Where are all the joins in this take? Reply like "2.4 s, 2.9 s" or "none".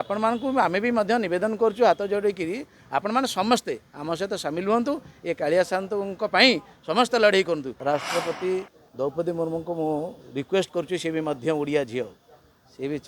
7.7 s